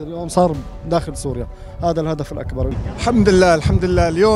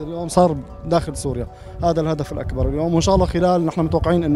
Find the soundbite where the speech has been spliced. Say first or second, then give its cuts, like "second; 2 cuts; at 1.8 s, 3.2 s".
first; 1 cut; at 2.8 s